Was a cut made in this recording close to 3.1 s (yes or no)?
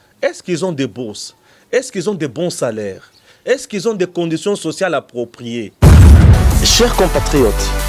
no